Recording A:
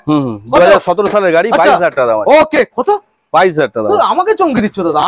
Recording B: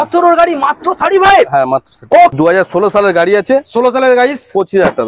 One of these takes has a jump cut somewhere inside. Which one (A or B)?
B